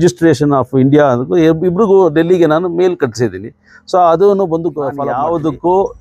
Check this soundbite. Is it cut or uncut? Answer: cut